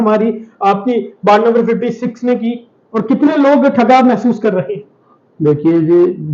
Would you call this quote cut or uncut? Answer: uncut